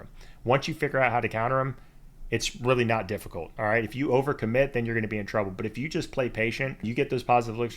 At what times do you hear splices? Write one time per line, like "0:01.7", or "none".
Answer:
0:06.8